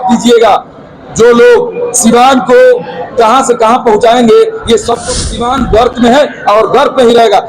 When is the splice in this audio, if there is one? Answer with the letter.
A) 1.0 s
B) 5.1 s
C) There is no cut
B